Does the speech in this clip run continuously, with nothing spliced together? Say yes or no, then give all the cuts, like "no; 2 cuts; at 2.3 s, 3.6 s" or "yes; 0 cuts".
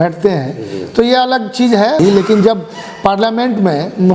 no; 1 cut; at 2.0 s